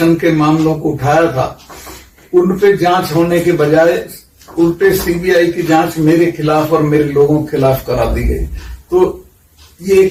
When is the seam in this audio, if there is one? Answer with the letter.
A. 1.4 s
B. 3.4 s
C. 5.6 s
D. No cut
D